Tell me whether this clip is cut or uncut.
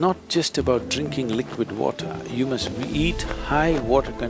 uncut